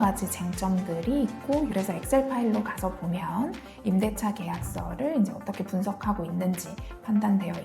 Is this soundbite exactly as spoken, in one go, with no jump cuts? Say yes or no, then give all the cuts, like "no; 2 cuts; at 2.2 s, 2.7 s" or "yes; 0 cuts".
no; 1 cut; at 1.7 s